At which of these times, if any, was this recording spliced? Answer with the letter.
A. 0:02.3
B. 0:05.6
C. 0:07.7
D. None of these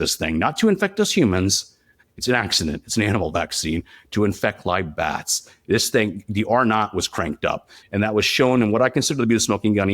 C